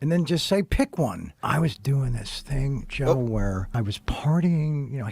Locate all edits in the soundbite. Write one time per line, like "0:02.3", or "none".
0:04.2